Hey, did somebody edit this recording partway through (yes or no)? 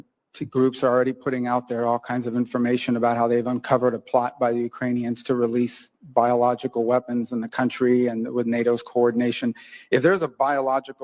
yes